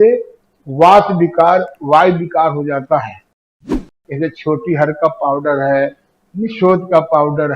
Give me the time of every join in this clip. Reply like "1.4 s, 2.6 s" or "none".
3.8 s